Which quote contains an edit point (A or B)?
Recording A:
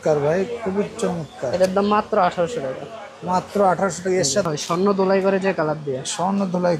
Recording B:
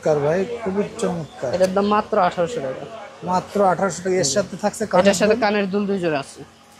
A